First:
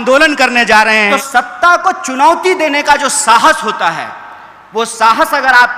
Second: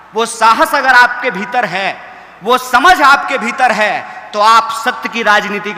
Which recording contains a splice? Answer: first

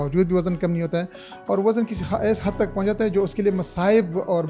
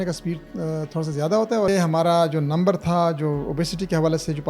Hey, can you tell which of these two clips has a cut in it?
second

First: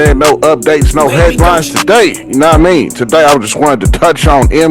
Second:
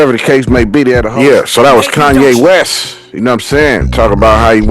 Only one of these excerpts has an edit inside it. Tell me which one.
second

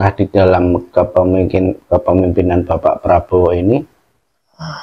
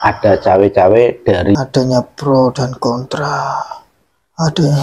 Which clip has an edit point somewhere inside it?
second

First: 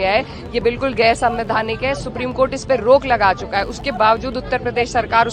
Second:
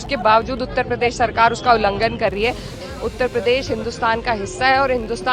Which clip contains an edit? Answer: second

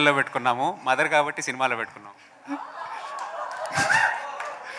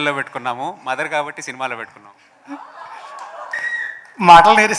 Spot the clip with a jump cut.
second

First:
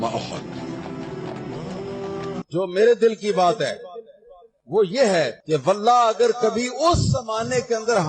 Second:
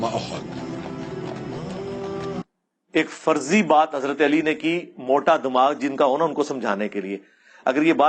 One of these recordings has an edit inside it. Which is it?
first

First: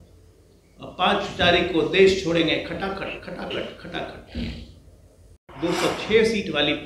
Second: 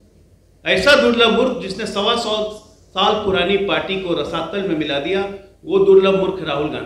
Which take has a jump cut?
first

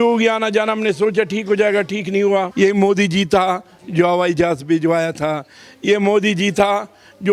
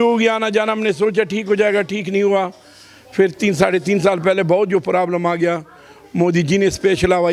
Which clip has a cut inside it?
first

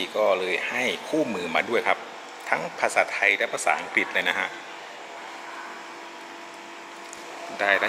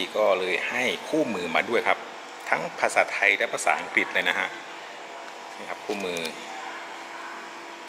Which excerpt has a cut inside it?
first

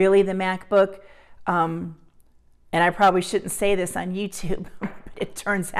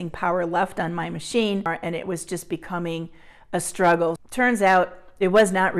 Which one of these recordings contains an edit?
second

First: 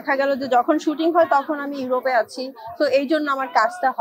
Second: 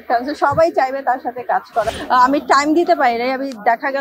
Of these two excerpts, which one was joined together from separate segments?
second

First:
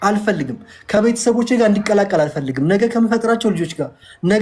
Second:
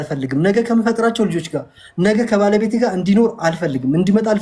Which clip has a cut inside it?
first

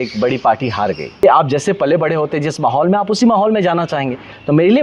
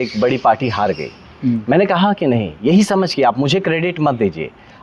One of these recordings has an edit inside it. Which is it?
first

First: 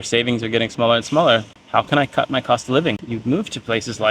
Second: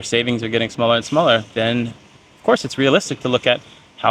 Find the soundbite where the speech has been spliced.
first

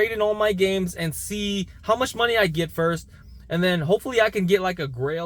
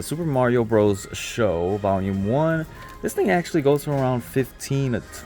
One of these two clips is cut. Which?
second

